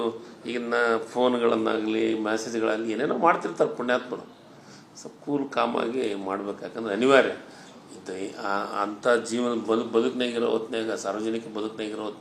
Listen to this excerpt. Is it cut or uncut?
cut